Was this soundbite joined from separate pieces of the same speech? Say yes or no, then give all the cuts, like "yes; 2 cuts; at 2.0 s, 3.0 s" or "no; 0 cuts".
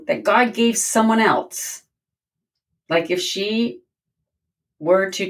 no; 0 cuts